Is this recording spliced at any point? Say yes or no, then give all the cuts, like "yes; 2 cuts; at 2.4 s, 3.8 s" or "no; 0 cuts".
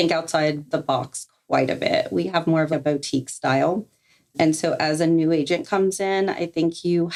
no; 0 cuts